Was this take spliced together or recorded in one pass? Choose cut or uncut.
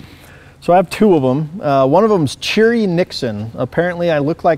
uncut